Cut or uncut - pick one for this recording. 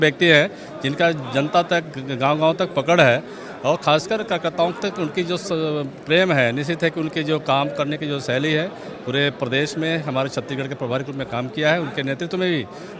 uncut